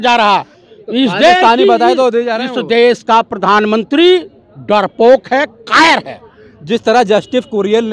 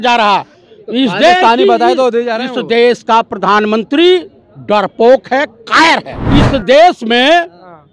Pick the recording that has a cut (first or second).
second